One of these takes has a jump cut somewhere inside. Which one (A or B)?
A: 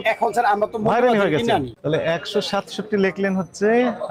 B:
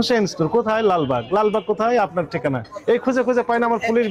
A